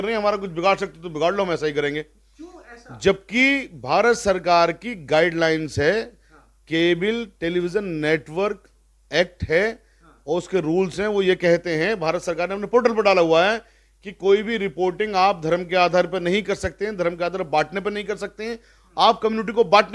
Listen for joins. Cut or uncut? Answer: uncut